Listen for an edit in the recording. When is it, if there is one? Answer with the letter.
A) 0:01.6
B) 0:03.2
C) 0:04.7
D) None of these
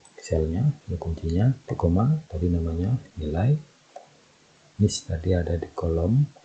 C